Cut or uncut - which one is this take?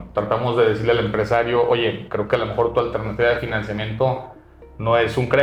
uncut